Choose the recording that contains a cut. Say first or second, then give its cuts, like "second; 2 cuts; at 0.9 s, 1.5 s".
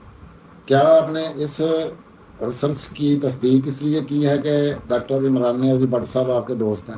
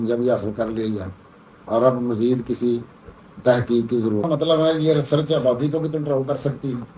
second; 1 cut; at 4.3 s